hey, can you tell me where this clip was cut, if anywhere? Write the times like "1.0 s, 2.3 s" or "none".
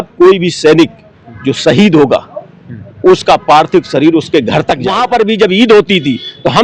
4.9 s